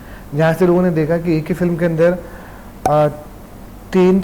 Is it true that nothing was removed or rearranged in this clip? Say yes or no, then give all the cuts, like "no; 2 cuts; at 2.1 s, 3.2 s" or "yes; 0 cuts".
yes; 0 cuts